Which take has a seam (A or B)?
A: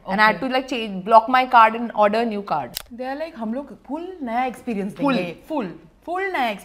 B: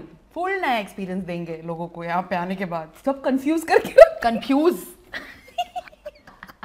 A